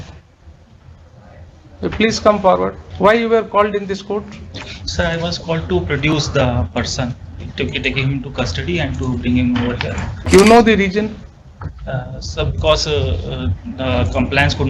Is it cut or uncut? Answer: cut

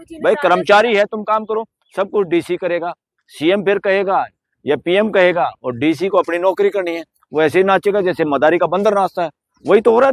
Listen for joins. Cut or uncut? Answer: uncut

